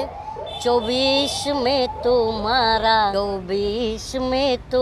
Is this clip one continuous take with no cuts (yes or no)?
no